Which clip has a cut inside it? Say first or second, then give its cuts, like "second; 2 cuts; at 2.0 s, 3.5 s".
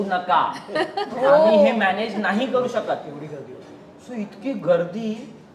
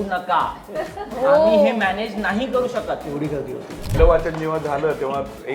second; 1 cut; at 3.9 s